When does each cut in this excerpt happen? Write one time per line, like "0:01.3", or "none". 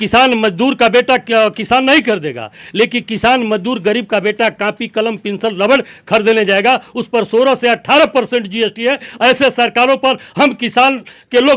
none